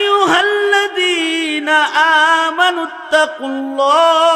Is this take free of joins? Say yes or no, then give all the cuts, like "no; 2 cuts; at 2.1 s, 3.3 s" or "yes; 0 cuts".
yes; 0 cuts